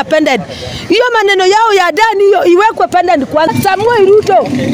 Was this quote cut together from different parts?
yes; 1 cut; at 3.5 s

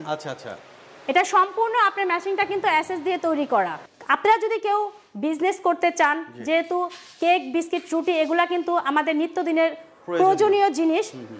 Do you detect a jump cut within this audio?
yes; 1 cut; at 3.8 s

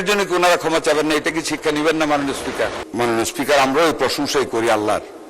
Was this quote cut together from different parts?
yes; 1 cut; at 2.8 s

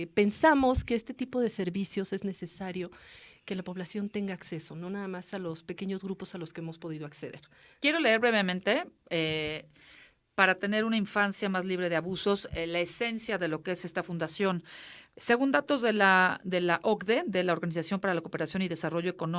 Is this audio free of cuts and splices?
yes; 0 cuts

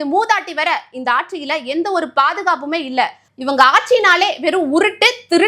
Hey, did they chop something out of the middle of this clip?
yes; 1 cut; at 3.2 s

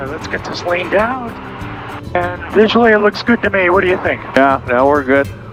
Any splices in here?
no; 0 cuts

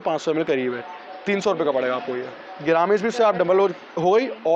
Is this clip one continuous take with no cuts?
yes; 0 cuts

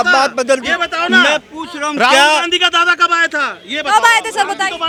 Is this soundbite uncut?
yes; 0 cuts

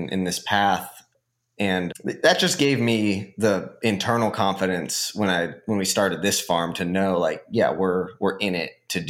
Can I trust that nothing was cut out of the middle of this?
yes; 0 cuts

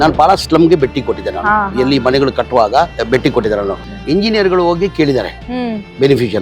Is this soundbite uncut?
no; 2 cuts; at 3.0 s, 3.9 s

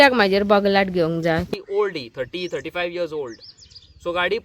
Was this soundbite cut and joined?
yes; 1 cut; at 1.5 s

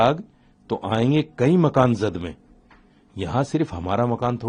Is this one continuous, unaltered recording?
yes; 0 cuts

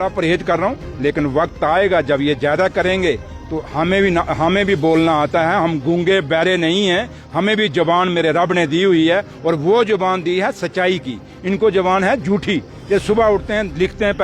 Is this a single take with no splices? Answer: yes; 0 cuts

